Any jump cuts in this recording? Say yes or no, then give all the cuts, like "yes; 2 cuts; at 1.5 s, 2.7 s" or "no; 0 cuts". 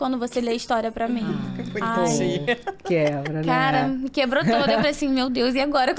no; 0 cuts